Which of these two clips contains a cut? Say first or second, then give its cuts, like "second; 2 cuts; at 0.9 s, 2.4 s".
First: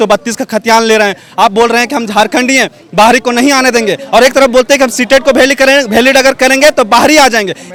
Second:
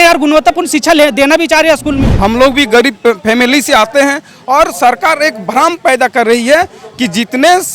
second; 1 cut; at 2.1 s